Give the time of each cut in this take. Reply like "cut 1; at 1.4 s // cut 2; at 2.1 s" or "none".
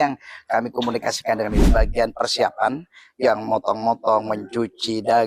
cut 1; at 1.7 s